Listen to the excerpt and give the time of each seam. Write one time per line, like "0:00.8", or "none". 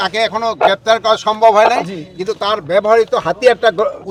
none